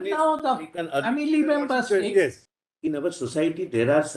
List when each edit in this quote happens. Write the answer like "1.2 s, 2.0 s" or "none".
2.5 s